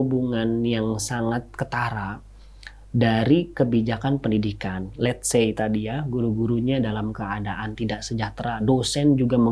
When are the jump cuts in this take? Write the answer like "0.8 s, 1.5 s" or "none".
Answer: none